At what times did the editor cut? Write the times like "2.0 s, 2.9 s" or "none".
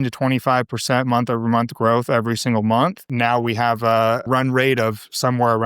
3.1 s, 4.2 s

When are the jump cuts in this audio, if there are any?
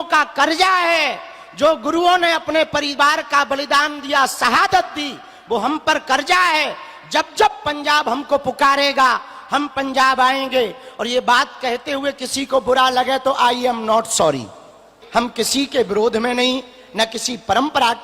15.0 s

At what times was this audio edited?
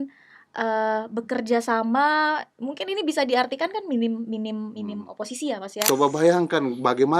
5.7 s

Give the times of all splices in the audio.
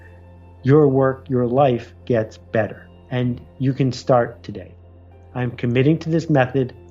4.8 s

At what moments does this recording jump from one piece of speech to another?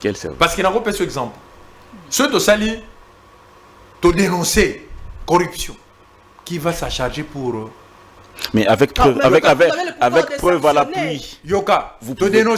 none

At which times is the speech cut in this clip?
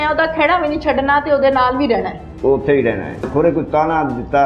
3.3 s

